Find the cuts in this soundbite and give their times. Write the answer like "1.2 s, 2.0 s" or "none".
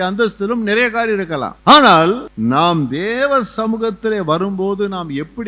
1.5 s, 2.3 s